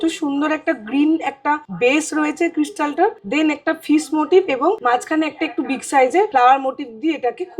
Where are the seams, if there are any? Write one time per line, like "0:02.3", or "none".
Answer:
0:01.7
0:03.2
0:04.8
0:06.3